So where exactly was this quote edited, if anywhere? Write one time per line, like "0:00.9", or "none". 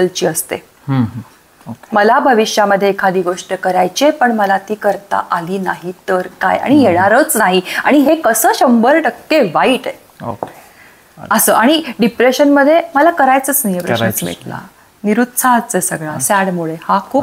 none